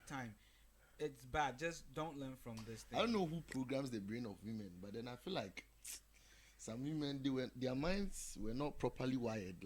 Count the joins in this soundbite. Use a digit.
1